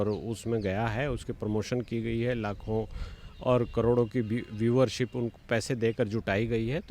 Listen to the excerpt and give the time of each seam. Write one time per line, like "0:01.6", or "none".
none